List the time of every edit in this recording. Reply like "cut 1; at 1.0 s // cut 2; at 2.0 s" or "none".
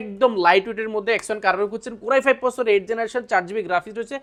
none